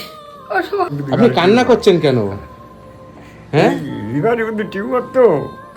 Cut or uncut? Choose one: cut